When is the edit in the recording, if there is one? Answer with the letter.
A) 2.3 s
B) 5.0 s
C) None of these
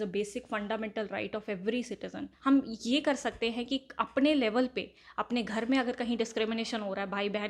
A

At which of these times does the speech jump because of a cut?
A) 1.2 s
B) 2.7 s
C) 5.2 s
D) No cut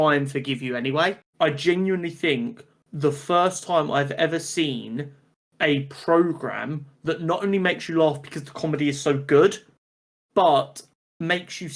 A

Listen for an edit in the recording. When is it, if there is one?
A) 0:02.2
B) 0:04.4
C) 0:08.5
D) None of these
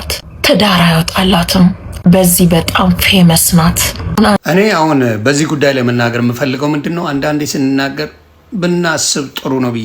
B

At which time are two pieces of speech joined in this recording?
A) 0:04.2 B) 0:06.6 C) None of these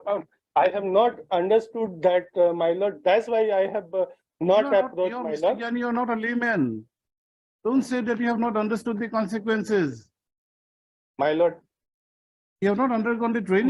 C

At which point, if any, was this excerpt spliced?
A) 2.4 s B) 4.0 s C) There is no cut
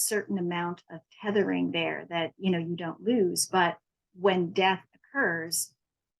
B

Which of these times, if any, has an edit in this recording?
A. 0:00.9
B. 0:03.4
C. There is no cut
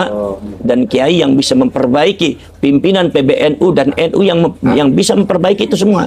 C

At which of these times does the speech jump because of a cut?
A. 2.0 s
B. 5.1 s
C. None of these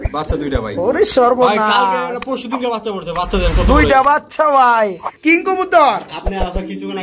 B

